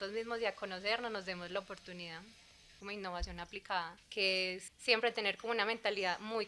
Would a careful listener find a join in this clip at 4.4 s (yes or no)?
yes